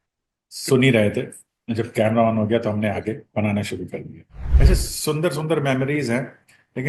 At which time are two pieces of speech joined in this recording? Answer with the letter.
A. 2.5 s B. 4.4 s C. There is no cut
B